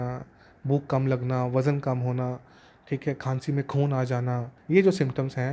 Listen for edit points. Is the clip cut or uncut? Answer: cut